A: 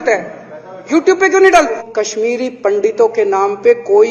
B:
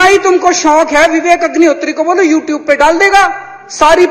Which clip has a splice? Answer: A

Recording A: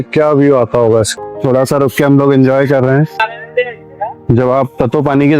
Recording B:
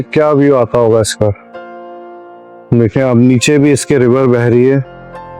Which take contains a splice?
A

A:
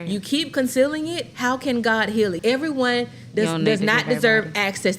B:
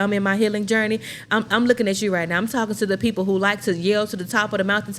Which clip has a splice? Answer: A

